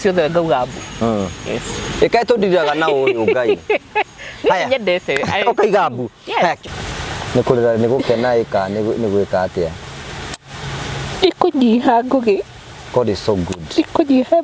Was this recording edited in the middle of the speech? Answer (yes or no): yes